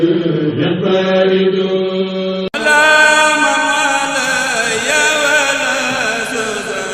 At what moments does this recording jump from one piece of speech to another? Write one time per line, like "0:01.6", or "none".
0:02.5

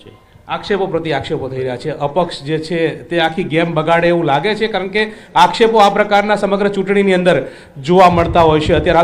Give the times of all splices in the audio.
0:07.1

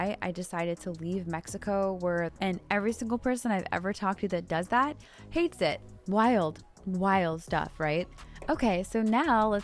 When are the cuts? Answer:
0:02.3
0:05.8

